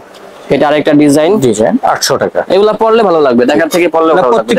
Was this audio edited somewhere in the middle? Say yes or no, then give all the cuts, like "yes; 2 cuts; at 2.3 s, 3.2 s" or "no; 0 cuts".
no; 0 cuts